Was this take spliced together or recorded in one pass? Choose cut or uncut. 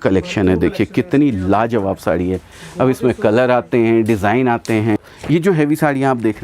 cut